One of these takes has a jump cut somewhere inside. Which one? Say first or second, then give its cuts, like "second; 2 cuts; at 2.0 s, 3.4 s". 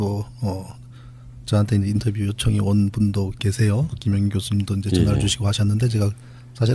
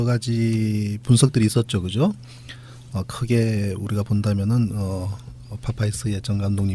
second; 1 cut; at 1.5 s